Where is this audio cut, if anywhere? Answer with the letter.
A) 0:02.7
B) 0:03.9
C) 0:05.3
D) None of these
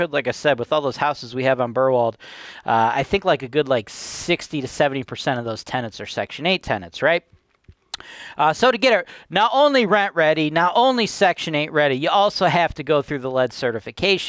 D